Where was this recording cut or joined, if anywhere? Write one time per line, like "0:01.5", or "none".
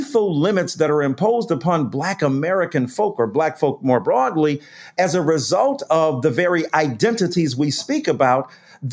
none